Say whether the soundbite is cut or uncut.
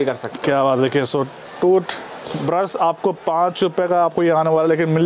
uncut